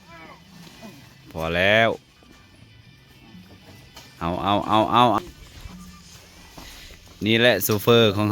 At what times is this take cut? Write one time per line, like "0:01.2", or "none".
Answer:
0:05.2